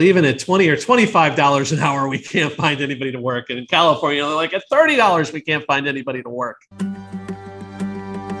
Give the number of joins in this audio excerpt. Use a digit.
1